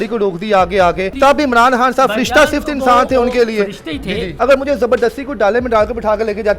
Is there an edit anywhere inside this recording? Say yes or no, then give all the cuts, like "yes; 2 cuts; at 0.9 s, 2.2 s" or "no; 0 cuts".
yes; 2 cuts; at 1.1 s, 4.3 s